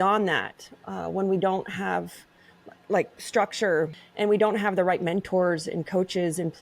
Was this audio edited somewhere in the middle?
yes; 1 cut; at 4.0 s

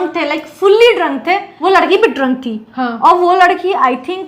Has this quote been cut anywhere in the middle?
yes; 1 cut; at 1.5 s

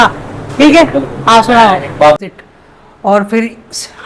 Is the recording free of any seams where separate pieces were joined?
no; 1 cut; at 2.2 s

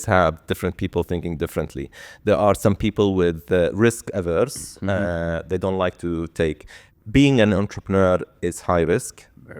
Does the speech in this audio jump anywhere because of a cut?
no; 0 cuts

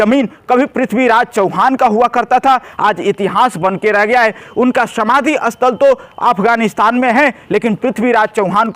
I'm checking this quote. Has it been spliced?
no; 0 cuts

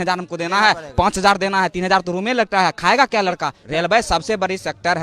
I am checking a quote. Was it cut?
yes; 1 cut; at 3.6 s

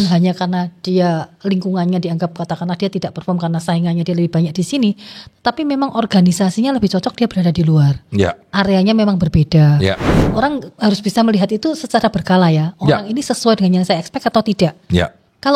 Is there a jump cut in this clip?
yes; 1 cut; at 10.1 s

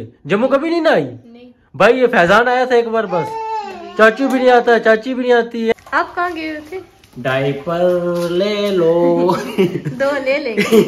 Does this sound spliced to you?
yes; 1 cut; at 5.7 s

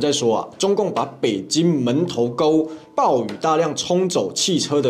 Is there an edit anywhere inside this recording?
no; 0 cuts

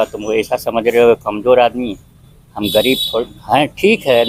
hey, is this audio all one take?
yes; 0 cuts

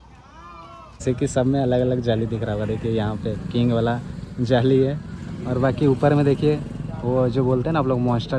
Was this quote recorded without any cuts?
no; 1 cut; at 1.0 s

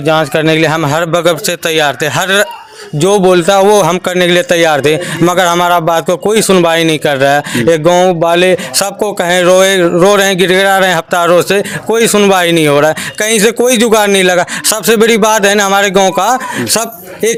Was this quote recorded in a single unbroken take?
yes; 0 cuts

